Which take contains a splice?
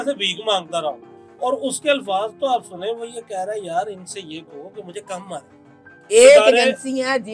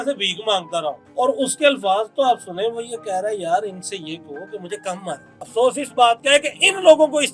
second; 2 cuts; at 1.0 s, 5.5 s

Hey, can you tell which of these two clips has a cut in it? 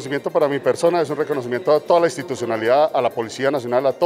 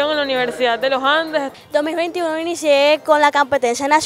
second; 1 cut; at 1.5 s

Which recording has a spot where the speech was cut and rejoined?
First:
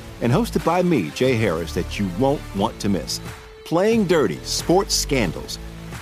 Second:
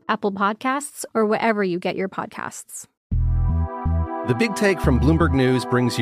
second; 1 cut; at 2.9 s

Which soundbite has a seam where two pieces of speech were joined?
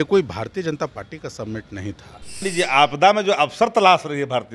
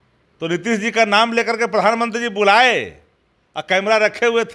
first; 1 cut; at 2.4 s

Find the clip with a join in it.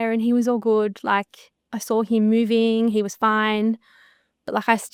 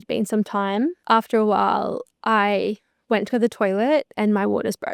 second; 1 cut; at 1.0 s

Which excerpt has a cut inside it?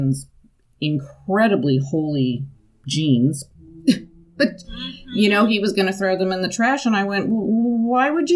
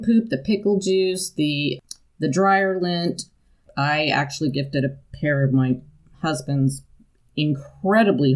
second; 2 cuts; at 1.8 s, 3.7 s

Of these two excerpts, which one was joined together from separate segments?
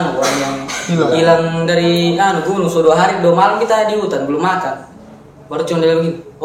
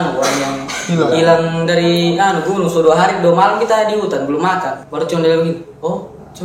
second; 1 cut; at 4.8 s

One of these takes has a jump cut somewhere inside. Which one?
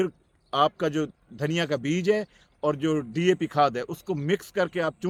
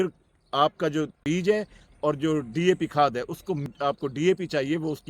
second; 2 cuts; at 1.2 s, 3.7 s

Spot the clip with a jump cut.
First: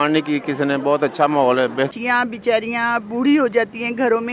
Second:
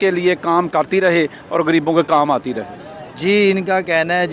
first; 1 cut; at 2.0 s

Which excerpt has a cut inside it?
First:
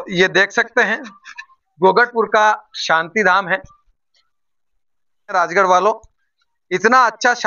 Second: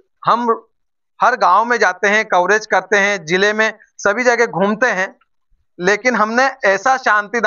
first; 1 cut; at 5.3 s

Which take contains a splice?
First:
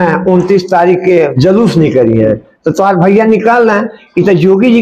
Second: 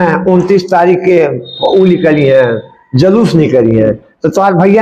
first; 1 cut; at 1.3 s

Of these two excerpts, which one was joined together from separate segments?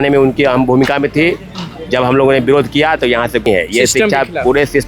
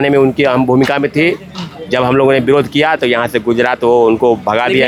first; 1 cut; at 3.5 s

